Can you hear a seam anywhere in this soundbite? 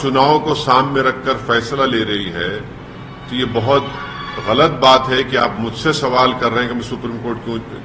no; 0 cuts

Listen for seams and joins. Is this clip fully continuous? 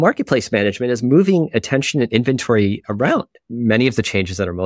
no; 1 cut; at 3.4 s

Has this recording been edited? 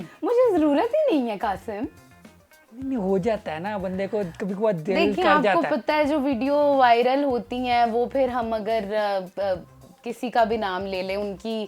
no; 0 cuts

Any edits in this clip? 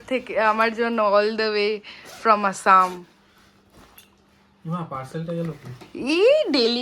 no; 0 cuts

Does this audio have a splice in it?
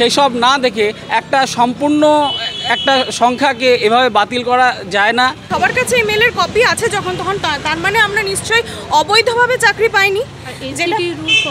yes; 1 cut; at 5.4 s

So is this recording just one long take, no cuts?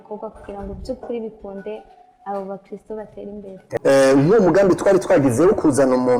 no; 1 cut; at 3.6 s

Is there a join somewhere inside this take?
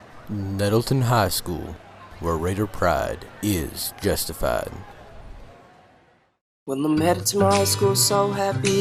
no; 0 cuts

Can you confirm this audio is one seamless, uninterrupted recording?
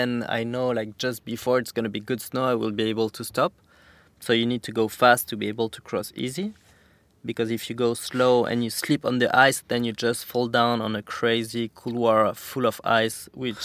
yes; 0 cuts

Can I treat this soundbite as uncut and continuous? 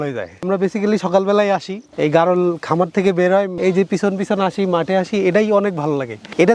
no; 1 cut; at 3.5 s

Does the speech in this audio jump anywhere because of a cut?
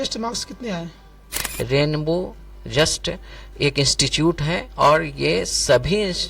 yes; 1 cut; at 1.4 s

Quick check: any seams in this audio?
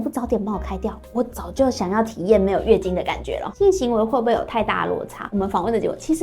yes; 2 cuts; at 3.4 s, 5.3 s

